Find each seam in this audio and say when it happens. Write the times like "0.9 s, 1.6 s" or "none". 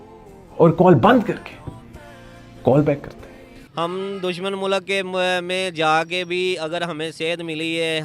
3.6 s